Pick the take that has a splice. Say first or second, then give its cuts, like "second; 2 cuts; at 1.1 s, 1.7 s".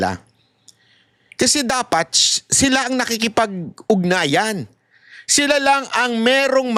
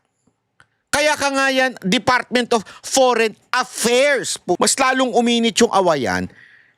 second; 1 cut; at 4.6 s